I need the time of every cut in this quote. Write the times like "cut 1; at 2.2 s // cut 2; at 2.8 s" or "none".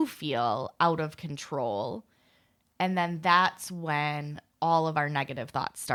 none